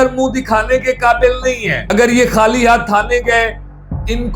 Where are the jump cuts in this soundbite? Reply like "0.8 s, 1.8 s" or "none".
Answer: 1.7 s